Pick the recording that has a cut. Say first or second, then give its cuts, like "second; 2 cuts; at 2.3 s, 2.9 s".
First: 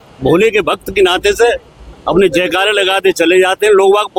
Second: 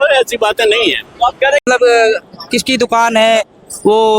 second; 1 cut; at 1.6 s